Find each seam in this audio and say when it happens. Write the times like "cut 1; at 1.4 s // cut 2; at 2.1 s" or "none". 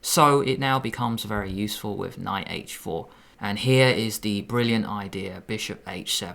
cut 1; at 3.2 s